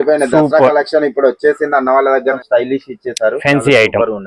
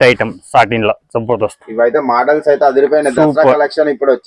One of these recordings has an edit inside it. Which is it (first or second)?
first